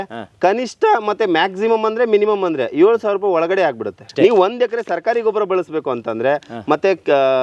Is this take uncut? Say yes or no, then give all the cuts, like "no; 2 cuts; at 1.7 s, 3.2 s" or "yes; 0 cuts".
no; 1 cut; at 4.0 s